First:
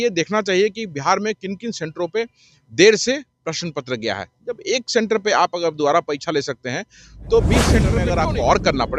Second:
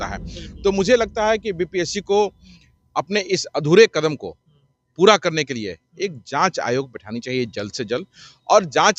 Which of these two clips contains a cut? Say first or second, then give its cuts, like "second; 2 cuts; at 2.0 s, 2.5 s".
first; 1 cut; at 7.9 s